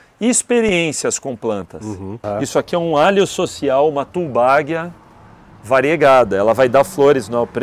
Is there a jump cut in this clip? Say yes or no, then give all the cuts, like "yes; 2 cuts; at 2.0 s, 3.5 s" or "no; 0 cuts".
yes; 1 cut; at 2.3 s